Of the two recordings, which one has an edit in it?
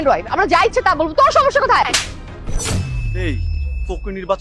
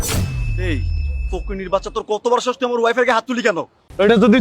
second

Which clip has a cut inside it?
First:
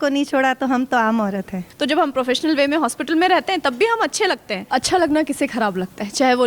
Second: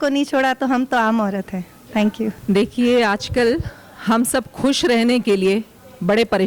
first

